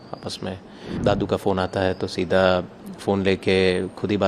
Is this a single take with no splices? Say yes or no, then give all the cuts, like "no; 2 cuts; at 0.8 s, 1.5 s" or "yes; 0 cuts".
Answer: no; 1 cut; at 1.0 s